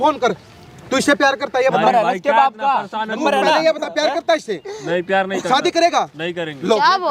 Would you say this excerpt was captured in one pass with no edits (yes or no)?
yes